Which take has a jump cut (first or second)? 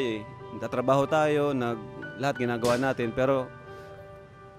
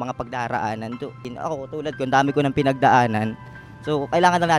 second